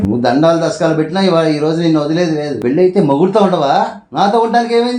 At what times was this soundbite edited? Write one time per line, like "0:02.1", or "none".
none